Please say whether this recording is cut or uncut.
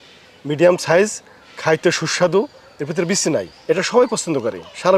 cut